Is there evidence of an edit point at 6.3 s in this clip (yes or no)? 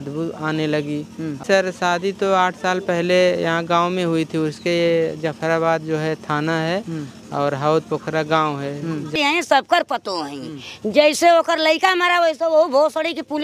no